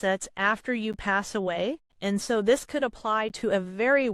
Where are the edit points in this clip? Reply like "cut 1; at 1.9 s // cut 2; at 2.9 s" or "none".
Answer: cut 1; at 1.9 s